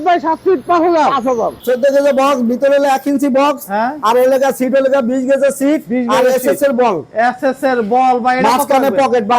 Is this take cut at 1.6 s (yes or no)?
yes